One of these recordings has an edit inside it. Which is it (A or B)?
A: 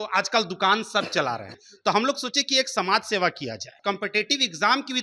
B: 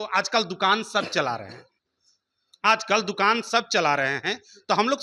A